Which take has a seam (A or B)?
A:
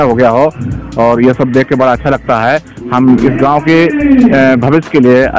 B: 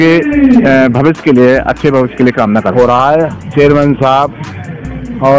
B